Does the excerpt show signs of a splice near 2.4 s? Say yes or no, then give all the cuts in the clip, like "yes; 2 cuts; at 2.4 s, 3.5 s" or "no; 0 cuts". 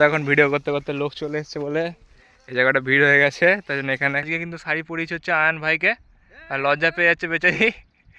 no; 1 cut; at 4.3 s